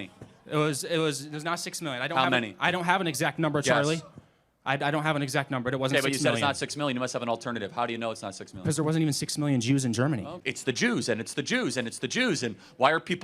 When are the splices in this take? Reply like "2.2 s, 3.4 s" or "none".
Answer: 10.3 s